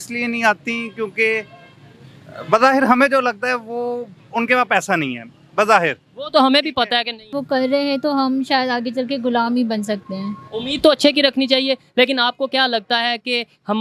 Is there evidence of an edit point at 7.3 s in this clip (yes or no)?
yes